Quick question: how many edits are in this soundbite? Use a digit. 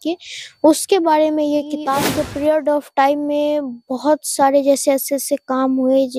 1